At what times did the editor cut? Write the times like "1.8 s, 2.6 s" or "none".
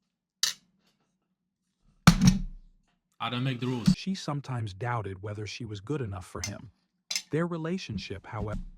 4.0 s